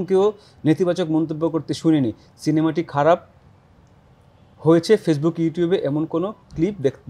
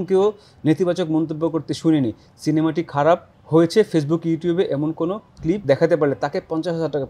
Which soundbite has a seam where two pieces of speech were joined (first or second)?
second